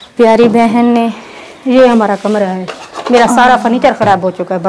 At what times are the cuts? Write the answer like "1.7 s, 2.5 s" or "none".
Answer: none